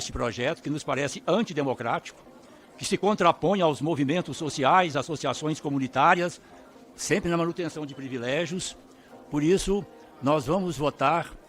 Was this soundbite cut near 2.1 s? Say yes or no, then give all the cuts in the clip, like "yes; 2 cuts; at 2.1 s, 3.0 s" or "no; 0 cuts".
no; 0 cuts